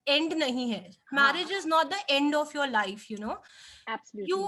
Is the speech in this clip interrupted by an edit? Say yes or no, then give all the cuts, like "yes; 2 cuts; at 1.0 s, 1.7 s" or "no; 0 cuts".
no; 0 cuts